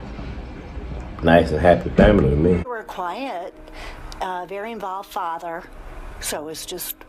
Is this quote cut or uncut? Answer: cut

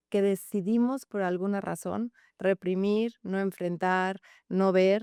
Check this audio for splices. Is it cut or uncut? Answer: uncut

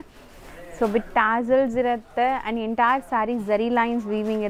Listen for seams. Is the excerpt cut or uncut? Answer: uncut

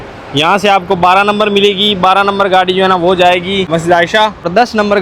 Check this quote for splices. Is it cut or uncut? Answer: uncut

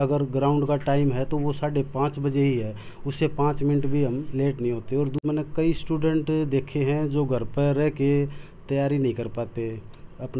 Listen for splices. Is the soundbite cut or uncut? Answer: cut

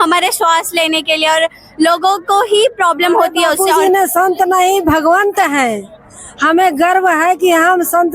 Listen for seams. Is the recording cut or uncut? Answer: cut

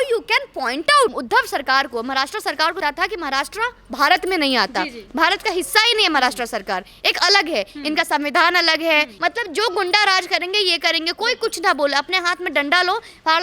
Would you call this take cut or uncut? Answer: cut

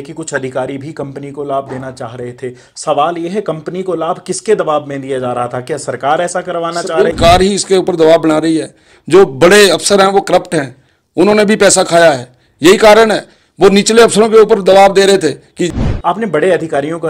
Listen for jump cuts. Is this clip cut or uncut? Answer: cut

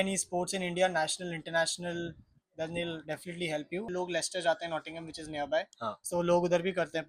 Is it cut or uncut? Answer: cut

